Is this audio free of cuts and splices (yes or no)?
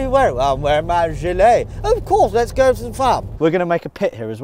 no